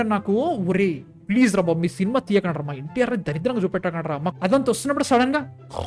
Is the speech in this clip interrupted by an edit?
yes; 1 cut; at 4.3 s

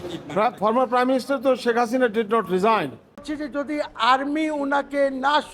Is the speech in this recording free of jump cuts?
no; 1 cut; at 3.3 s

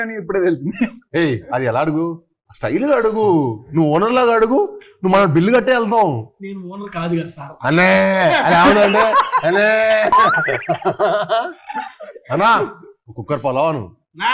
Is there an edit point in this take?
no; 0 cuts

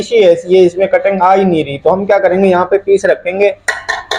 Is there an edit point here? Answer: no; 0 cuts

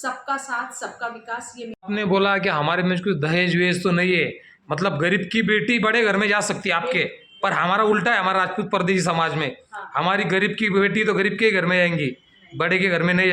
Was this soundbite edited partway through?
yes; 1 cut; at 1.8 s

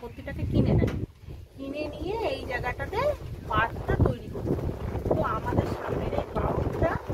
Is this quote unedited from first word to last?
yes; 0 cuts

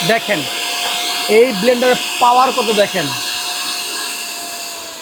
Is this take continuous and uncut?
yes; 0 cuts

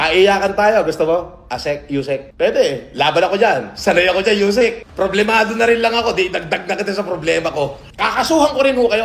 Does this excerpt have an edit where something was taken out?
yes; 2 cuts; at 4.8 s, 7.9 s

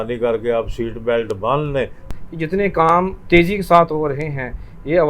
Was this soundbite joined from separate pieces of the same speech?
yes; 1 cut; at 2.0 s

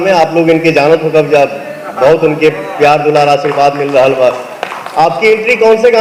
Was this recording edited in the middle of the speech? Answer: no; 0 cuts

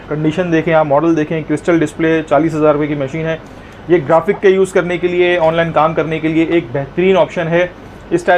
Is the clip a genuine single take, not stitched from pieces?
yes; 0 cuts

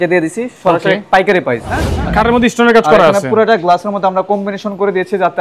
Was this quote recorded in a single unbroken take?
no; 1 cut; at 1.9 s

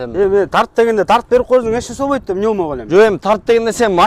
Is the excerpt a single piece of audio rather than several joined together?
yes; 0 cuts

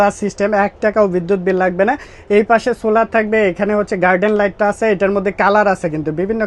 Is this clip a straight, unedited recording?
yes; 0 cuts

